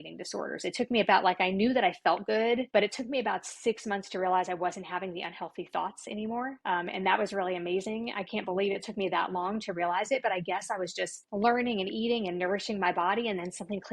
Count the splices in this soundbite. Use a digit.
3